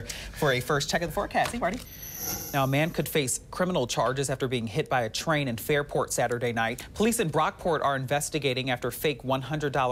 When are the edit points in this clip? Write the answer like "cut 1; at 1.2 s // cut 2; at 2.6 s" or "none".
cut 1; at 1.8 s // cut 2; at 6.8 s